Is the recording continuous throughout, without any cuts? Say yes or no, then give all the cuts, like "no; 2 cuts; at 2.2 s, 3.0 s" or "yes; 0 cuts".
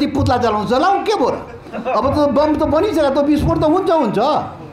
yes; 0 cuts